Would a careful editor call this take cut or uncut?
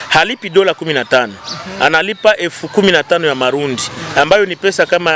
uncut